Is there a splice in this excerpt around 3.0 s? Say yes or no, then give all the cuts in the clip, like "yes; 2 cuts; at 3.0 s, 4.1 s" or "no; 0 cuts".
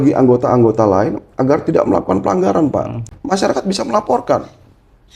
yes; 1 cut; at 3.0 s